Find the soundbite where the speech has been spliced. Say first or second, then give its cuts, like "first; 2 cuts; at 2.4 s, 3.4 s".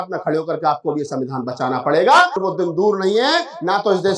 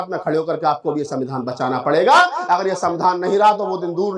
first; 1 cut; at 2.4 s